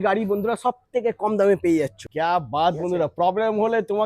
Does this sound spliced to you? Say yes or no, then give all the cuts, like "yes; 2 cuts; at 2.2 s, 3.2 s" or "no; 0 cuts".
yes; 1 cut; at 2.0 s